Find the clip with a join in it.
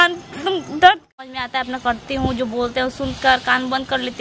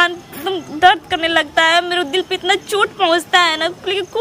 first; 1 cut; at 1.1 s

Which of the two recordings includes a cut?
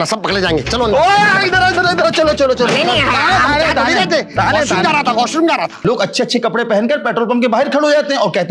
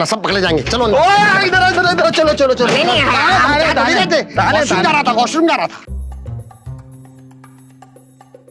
first; 1 cut; at 5.8 s

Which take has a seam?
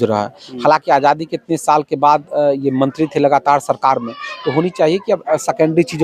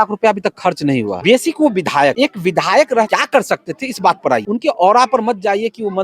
second; 4 cuts; at 1.2 s, 2.1 s, 3.1 s, 4.4 s

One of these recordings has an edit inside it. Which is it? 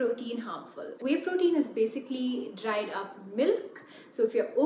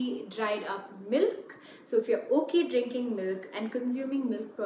first; 1 cut; at 0.9 s

